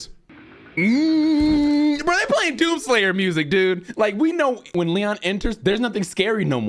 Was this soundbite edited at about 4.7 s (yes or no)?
yes